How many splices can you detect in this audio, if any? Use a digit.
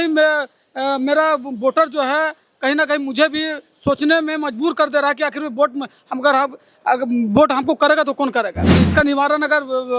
1